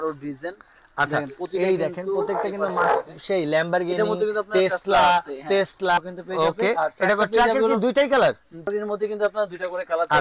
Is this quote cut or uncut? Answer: cut